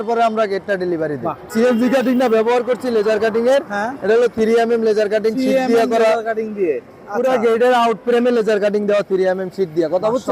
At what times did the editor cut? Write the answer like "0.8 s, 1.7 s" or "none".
1.5 s